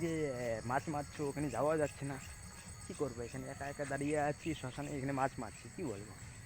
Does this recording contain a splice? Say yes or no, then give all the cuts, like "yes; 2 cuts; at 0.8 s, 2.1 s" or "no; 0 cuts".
no; 0 cuts